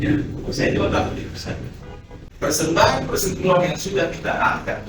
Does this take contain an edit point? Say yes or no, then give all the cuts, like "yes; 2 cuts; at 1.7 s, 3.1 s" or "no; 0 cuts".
yes; 1 cut; at 2.2 s